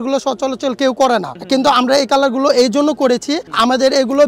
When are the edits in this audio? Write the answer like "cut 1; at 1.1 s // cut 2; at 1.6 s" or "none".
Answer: none